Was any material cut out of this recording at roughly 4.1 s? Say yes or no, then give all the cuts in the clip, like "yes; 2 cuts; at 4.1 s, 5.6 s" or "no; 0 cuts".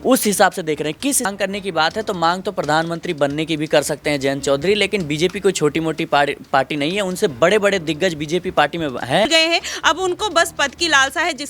no; 2 cuts; at 1.3 s, 9.3 s